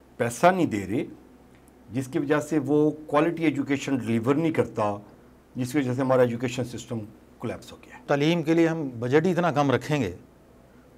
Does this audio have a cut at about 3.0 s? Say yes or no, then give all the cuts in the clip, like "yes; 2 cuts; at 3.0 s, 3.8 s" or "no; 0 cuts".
no; 1 cut; at 8.0 s